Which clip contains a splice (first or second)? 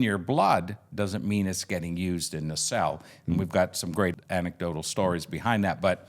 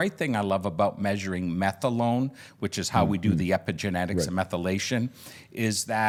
first